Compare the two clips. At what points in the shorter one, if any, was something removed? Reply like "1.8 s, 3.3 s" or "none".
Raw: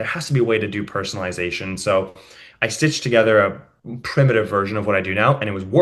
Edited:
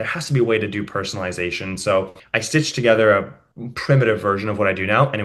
2.2 s